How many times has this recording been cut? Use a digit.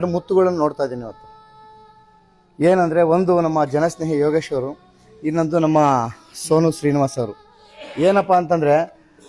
0